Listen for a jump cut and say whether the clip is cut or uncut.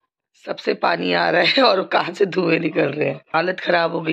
cut